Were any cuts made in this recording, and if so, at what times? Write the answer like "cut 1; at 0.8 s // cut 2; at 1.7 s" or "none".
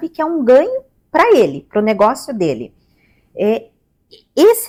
none

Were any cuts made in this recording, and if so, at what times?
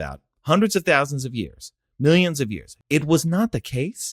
cut 1; at 2.7 s

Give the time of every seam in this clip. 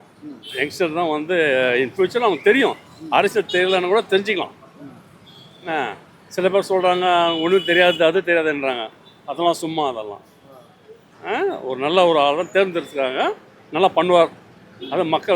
none

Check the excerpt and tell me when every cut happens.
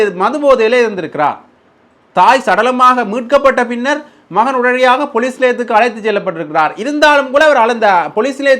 none

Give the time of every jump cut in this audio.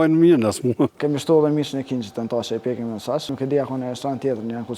cut 1; at 1.0 s // cut 2; at 3.3 s

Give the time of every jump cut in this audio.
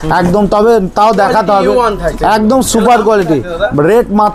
none

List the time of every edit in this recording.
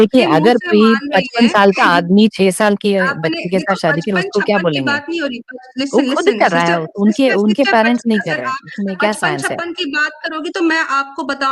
cut 1; at 8.4 s

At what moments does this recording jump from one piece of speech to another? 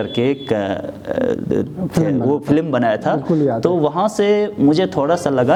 none

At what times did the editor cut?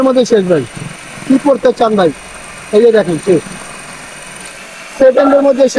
none

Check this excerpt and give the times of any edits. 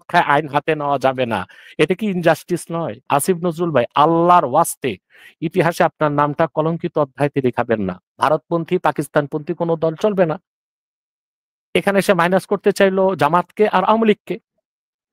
cut 1; at 3.0 s // cut 2; at 8.0 s

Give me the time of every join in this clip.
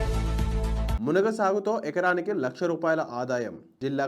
cut 1; at 0.9 s

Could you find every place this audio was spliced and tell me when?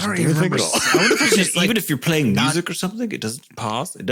none

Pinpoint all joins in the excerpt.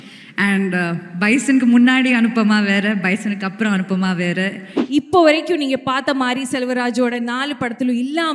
cut 1; at 4.7 s

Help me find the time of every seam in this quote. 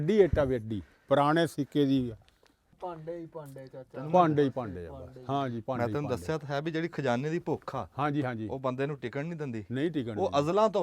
cut 1; at 2.7 s

